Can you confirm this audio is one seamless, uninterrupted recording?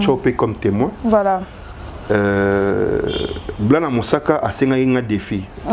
yes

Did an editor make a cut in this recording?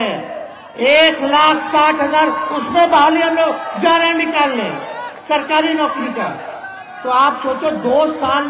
no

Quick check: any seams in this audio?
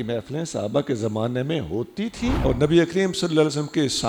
no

